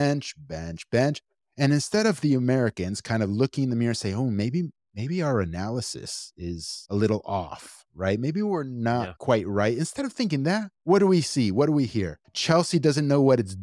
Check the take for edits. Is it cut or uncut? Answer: uncut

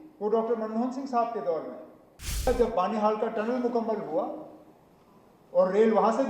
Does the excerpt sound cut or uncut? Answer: cut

